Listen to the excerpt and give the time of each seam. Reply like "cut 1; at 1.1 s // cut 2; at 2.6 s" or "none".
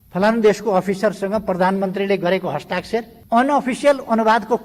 cut 1; at 3.2 s